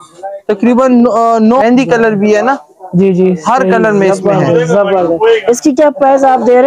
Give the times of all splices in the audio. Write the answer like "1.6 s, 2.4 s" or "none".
1.6 s

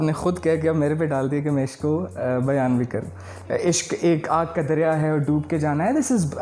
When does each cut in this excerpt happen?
3.3 s

